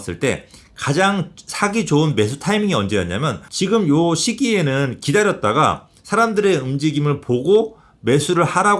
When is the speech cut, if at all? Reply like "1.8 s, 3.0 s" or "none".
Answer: 3.5 s